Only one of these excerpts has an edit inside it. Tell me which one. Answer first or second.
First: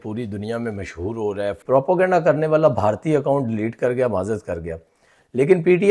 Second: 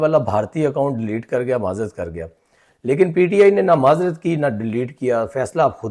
first